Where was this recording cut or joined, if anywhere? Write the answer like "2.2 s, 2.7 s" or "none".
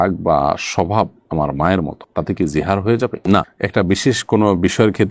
none